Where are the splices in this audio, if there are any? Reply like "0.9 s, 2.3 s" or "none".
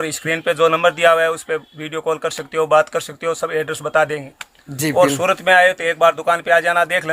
none